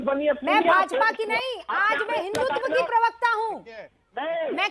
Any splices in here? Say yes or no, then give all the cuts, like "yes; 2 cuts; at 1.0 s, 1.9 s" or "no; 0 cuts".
no; 0 cuts